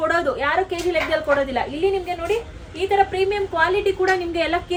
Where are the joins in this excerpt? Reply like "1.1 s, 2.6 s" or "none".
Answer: none